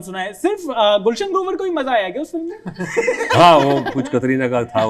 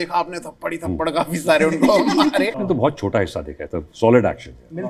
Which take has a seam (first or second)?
second